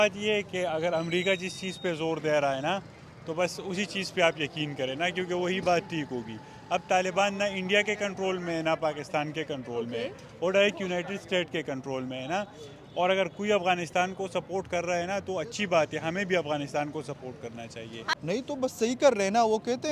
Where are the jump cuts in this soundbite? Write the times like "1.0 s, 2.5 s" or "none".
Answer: 18.1 s